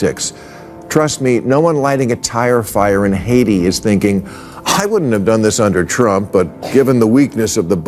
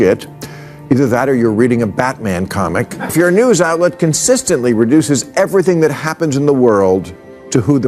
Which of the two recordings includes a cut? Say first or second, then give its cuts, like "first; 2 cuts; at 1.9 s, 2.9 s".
second; 1 cut; at 2.9 s